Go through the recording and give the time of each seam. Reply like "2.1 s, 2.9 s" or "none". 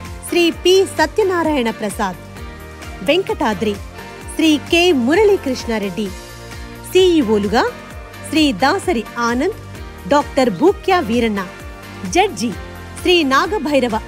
none